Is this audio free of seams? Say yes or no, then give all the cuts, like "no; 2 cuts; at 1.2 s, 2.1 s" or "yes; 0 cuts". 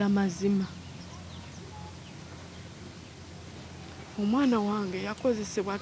yes; 0 cuts